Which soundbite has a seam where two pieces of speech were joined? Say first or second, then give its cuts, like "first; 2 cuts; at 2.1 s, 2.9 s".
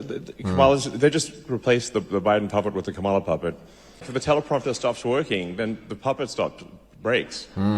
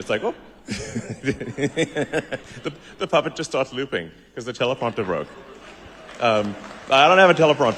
first; 1 cut; at 4.1 s